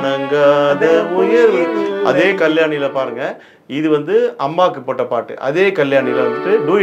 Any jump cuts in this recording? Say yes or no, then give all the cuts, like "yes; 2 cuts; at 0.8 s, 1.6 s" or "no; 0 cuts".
no; 0 cuts